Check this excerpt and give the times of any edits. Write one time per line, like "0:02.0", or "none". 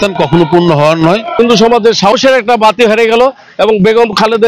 0:01.4